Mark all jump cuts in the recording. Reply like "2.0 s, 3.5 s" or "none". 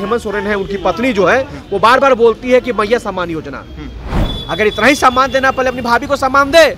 4.2 s

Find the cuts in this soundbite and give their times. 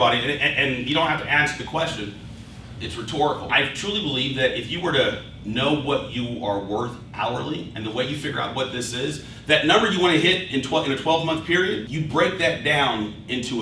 none

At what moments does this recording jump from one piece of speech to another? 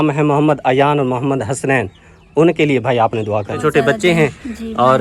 3.6 s

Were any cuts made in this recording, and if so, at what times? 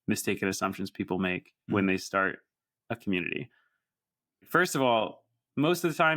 1.5 s

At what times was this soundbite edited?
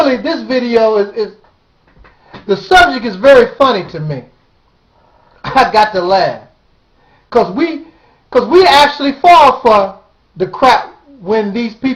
3.1 s

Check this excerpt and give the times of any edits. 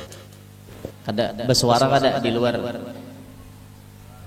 0.9 s

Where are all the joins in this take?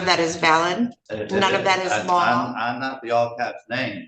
1.1 s

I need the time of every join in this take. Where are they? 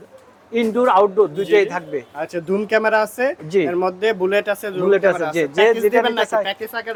none

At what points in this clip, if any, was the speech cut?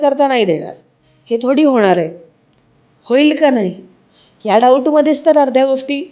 none

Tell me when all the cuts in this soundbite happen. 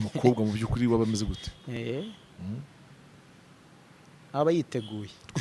none

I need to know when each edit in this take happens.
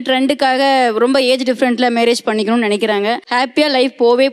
3.2 s

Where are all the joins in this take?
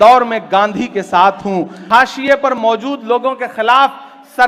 1.7 s

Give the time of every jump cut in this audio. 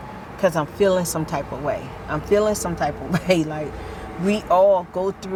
none

